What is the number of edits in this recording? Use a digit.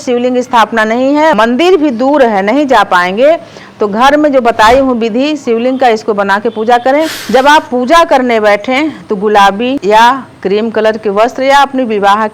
1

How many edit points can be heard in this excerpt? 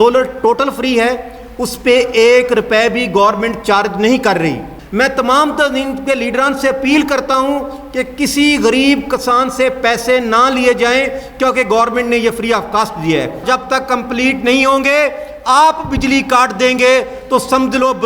2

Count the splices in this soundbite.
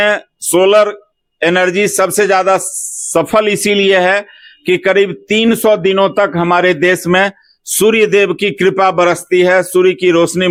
0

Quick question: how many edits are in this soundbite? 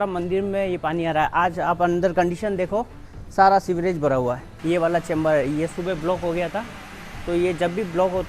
1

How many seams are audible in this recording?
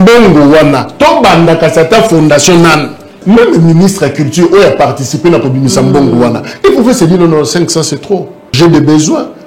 2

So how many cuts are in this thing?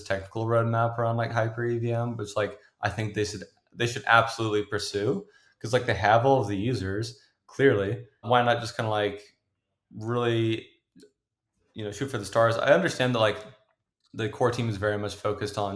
1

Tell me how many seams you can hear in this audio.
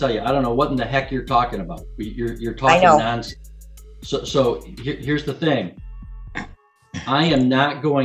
0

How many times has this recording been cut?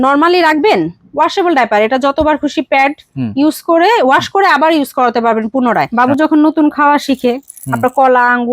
1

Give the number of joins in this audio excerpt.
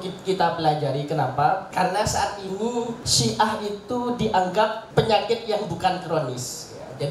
3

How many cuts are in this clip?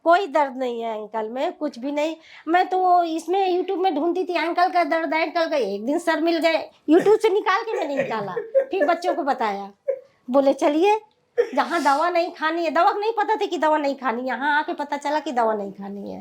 0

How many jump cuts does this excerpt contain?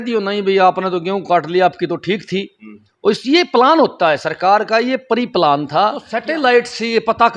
1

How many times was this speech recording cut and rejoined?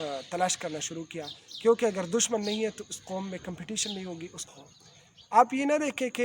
1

